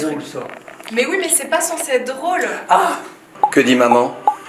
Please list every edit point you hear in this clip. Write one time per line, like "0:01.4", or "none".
0:03.3

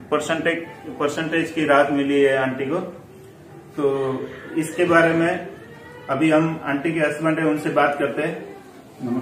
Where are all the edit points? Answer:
none

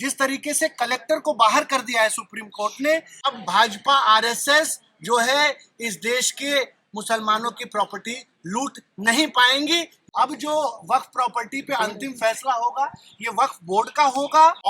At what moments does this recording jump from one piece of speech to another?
0:03.3
0:10.0

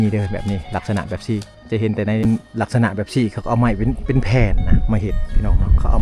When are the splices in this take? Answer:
0:02.2

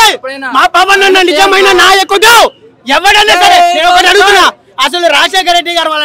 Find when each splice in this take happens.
none

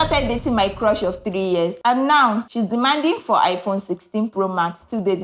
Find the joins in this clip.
0:01.8
0:02.5

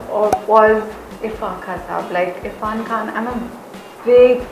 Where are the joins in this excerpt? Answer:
none

